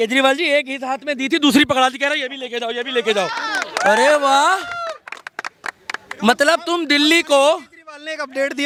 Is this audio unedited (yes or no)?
yes